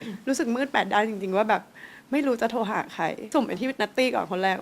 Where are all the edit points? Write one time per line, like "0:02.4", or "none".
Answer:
0:03.2